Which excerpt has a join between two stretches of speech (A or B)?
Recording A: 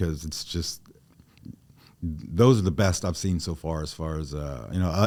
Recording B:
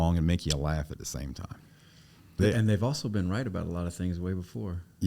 B